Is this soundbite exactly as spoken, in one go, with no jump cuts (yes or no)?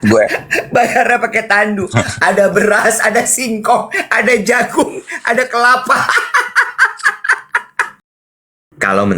no